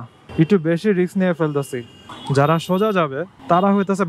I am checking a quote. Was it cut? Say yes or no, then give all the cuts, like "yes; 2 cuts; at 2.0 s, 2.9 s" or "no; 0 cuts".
yes; 1 cut; at 2.0 s